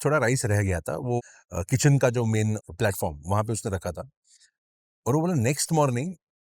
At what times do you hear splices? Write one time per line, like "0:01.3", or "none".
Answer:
0:01.2
0:02.6